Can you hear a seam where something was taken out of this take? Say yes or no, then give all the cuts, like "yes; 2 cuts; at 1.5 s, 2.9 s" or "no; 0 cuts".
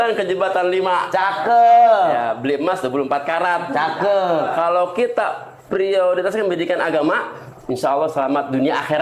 no; 0 cuts